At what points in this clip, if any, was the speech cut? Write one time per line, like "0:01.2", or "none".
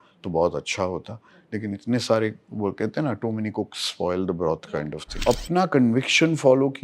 0:05.2